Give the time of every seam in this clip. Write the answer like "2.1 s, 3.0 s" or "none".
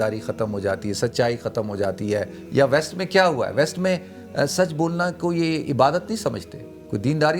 2.4 s